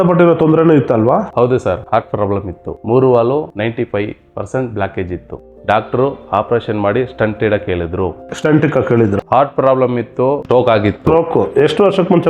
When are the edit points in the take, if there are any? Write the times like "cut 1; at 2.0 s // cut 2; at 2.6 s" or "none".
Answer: cut 1; at 9.2 s